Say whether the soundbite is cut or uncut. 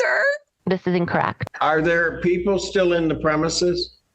cut